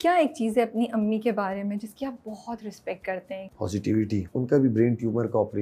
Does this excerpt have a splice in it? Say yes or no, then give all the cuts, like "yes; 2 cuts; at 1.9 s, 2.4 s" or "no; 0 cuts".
yes; 2 cuts; at 3.5 s, 4.3 s